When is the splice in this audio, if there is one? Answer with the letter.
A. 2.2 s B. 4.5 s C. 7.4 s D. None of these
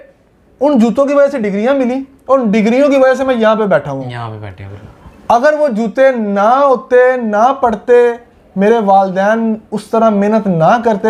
D